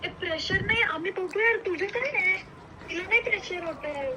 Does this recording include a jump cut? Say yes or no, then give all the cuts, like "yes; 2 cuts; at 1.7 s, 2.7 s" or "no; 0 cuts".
no; 0 cuts